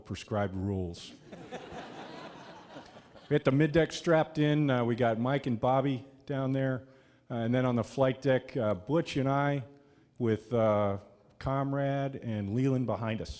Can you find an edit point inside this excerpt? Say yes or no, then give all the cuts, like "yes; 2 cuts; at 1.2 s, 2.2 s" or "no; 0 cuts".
yes; 1 cut; at 3.7 s